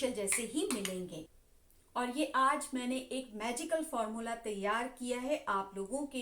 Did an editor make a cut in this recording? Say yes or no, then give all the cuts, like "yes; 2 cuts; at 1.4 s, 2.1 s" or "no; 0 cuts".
yes; 1 cut; at 1.1 s